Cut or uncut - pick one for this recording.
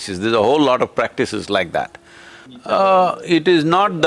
cut